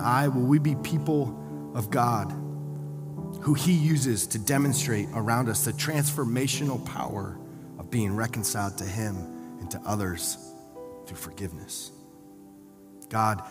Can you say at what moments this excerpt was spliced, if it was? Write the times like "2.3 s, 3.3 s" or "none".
none